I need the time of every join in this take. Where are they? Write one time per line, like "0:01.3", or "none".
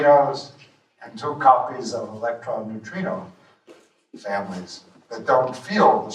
0:01.7